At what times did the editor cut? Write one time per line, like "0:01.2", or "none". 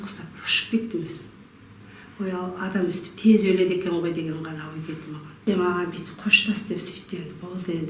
0:05.4